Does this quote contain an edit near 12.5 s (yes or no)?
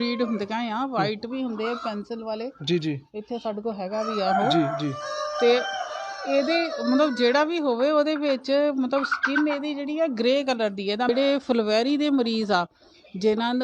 no